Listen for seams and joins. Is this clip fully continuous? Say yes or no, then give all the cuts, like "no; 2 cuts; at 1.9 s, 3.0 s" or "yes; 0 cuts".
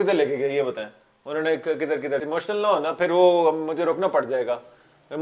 no; 1 cut; at 2.2 s